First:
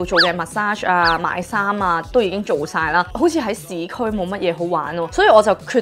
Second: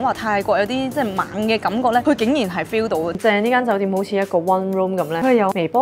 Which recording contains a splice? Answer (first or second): second